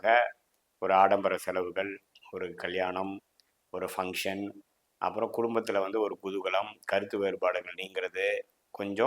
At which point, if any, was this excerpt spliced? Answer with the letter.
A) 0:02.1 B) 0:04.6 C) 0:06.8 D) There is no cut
D